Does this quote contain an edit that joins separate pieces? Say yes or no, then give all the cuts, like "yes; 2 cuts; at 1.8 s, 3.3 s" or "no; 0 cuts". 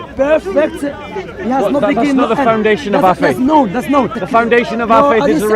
yes; 1 cut; at 4.2 s